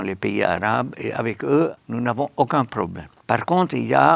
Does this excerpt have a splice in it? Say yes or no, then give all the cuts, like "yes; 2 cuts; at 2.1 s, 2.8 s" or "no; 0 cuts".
yes; 2 cuts; at 1.8 s, 3.1 s